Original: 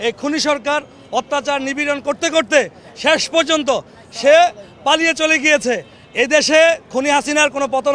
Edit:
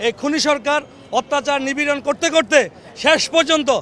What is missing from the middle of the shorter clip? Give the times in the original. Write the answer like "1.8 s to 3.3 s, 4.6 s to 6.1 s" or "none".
none